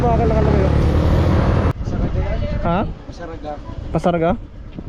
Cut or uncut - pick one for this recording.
cut